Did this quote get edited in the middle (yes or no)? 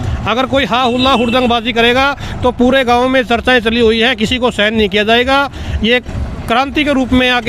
no